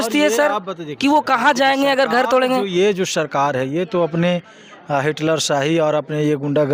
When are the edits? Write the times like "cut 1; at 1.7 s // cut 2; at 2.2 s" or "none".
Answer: none